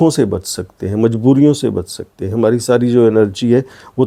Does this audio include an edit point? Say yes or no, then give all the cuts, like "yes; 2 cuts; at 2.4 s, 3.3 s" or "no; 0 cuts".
no; 0 cuts